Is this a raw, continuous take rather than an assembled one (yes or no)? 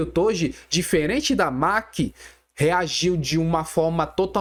yes